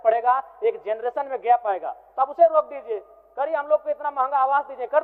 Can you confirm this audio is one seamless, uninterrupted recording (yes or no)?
yes